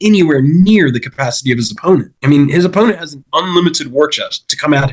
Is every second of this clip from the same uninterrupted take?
yes; 0 cuts

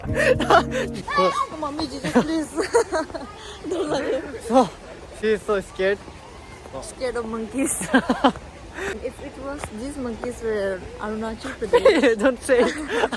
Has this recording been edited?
yes; 2 cuts; at 0.9 s, 9.0 s

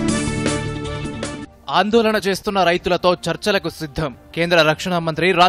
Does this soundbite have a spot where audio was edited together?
yes; 1 cut; at 1.4 s

